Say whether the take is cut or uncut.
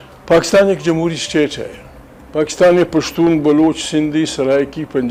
uncut